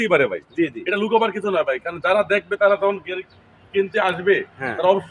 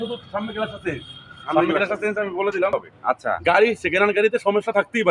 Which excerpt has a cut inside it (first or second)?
second